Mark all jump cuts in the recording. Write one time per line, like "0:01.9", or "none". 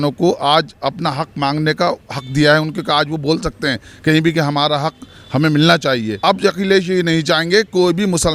0:06.1